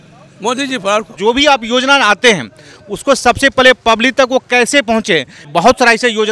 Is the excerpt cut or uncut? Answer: cut